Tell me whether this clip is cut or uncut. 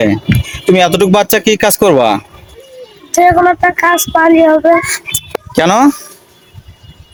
uncut